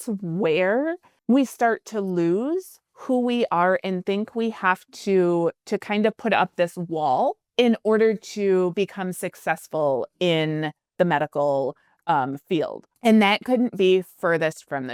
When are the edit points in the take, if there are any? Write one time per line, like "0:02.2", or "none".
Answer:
none